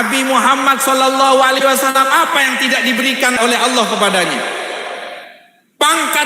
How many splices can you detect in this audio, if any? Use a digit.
1